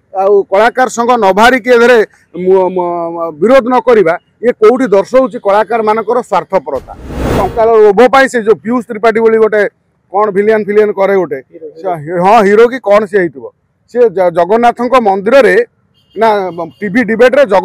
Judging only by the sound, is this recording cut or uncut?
cut